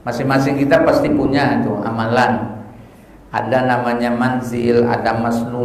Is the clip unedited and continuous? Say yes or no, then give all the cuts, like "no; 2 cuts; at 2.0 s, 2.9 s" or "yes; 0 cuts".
yes; 0 cuts